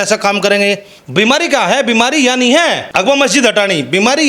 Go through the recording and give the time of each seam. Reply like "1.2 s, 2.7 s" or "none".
0.9 s, 2.8 s